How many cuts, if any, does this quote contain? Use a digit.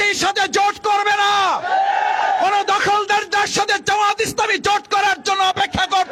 0